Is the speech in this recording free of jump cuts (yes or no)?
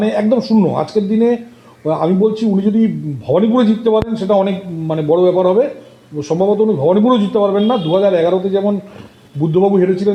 yes